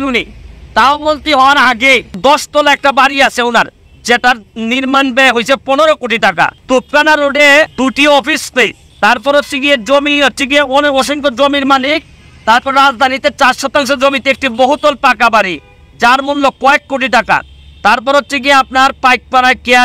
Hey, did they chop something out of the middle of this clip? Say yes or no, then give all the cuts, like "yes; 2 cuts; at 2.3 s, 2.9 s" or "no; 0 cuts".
yes; 4 cuts; at 2.2 s, 6.6 s, 7.7 s, 8.8 s